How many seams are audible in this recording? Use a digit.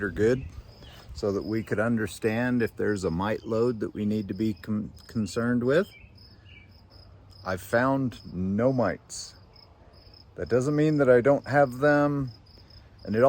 1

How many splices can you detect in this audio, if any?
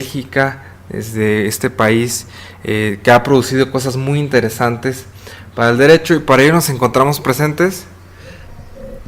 1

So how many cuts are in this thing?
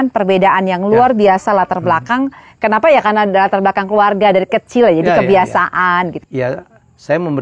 1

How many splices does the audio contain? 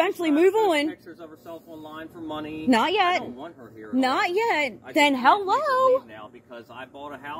0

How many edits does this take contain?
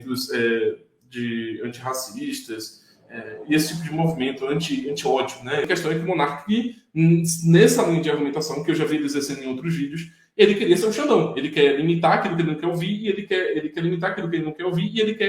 1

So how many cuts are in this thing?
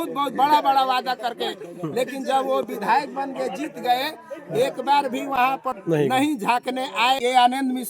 2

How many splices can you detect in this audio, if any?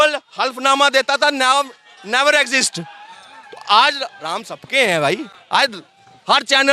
0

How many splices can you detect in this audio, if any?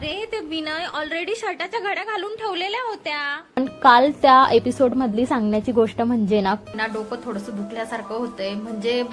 2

